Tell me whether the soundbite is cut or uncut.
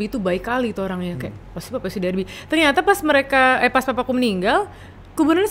uncut